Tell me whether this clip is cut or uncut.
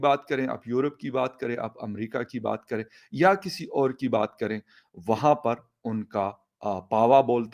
uncut